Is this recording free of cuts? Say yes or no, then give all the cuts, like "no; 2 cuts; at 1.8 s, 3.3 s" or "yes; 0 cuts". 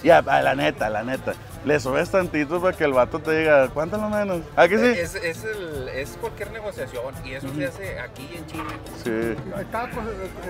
no; 1 cut; at 9.5 s